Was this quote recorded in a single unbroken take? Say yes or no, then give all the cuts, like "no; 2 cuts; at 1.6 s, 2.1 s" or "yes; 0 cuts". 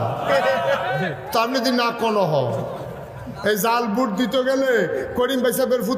yes; 0 cuts